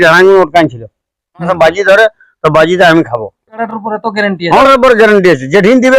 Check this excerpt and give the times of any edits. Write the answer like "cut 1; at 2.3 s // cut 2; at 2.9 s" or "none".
cut 1; at 1.5 s // cut 2; at 3.5 s // cut 3; at 4.6 s